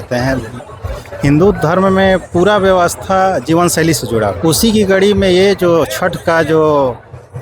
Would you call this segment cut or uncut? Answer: cut